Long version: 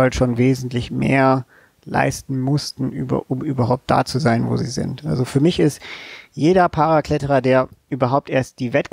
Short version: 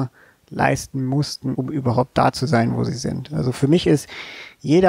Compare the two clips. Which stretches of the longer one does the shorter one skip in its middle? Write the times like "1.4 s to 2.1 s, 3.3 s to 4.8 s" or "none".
2.9 s to 3.3 s

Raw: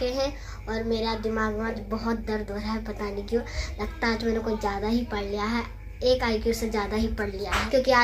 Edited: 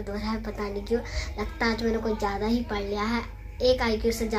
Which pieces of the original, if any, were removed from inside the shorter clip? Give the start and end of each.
none

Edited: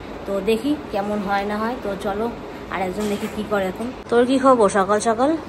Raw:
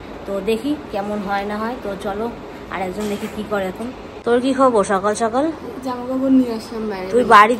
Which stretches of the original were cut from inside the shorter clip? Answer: 4.0 s to 4.1 s

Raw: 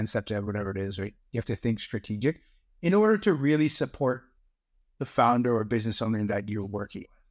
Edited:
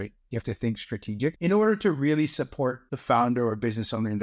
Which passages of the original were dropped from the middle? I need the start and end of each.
2.4 s to 2.8 s, 4.3 s to 5.0 s

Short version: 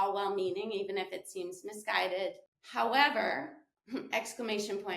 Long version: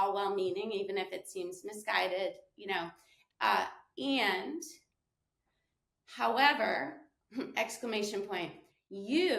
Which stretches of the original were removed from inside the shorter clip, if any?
2.5 s to 5.9 s

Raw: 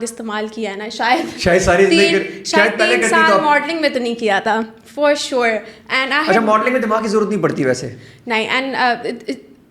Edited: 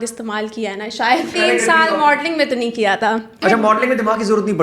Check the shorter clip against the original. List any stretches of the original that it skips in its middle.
1.3 s to 2.8 s, 4.8 s to 6.2 s

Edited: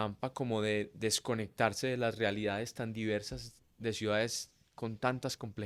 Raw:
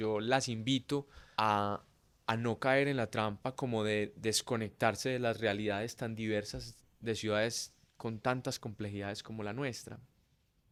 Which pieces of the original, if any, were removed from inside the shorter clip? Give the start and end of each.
none

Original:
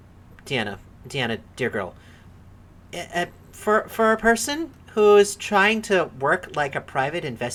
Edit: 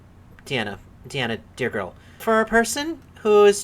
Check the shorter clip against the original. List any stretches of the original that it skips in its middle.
2.2 s to 3.9 s

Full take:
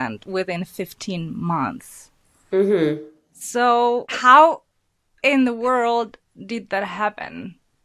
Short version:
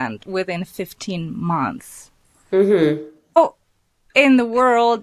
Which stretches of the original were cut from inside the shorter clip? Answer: 3.4 s to 4.4 s

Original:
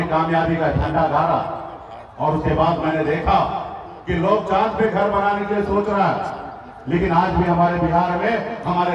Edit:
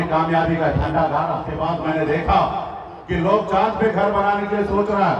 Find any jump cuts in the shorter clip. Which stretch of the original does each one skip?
1.5 s to 2.5 s

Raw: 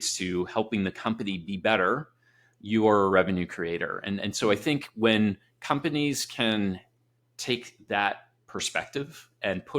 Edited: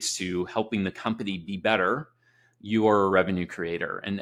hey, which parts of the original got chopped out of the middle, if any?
none

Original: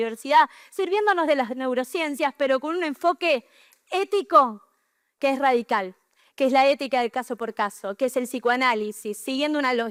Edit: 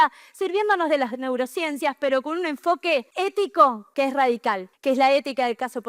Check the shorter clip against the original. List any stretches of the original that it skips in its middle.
3.5 s to 3.8 s, 4.6 s to 5.1 s, 5.9 s to 6.2 s

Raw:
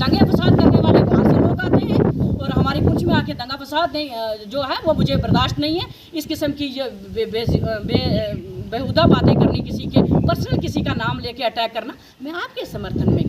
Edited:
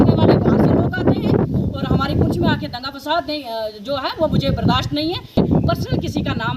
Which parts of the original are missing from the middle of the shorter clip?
6.0 s to 10.0 s

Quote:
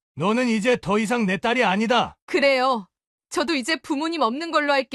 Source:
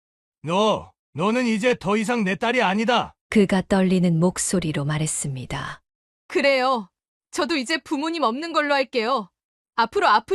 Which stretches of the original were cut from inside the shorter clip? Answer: 3.2 s to 6.2 s

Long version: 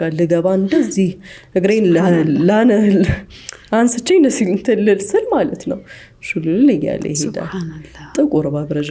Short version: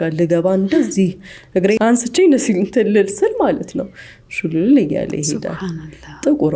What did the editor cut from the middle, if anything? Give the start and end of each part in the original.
1.8 s to 3.7 s

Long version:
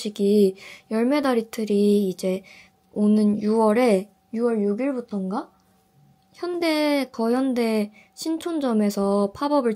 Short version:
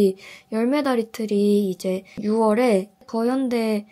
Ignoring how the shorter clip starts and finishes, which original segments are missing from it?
2.6 s to 3.4 s, 4.2 s to 7.1 s

